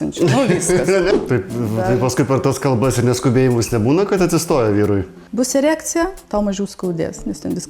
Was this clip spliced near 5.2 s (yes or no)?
yes